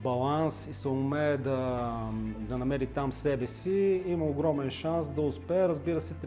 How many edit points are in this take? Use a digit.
0